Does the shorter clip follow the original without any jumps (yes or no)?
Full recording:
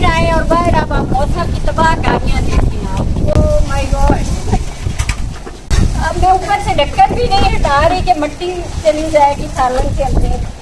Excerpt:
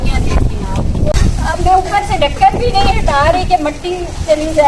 no